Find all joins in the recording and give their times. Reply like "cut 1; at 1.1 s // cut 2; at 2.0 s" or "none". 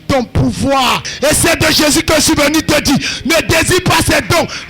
cut 1; at 1.1 s